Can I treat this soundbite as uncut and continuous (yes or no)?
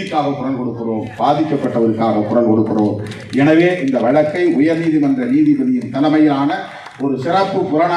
yes